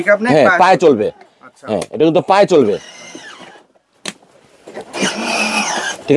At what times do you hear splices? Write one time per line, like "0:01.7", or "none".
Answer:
none